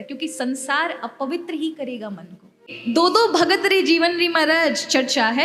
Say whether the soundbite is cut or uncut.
cut